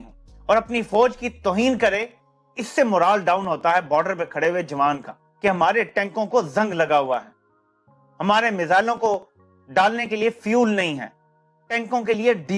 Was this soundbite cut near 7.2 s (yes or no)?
no